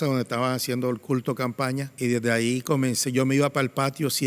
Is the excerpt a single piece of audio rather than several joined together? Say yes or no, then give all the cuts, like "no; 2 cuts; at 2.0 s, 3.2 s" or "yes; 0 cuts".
no; 1 cut; at 1.9 s